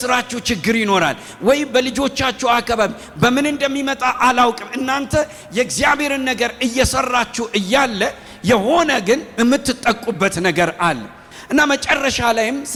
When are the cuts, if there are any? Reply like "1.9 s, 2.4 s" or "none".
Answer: none